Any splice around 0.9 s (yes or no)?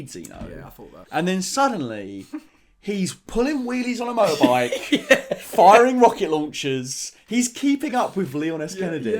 yes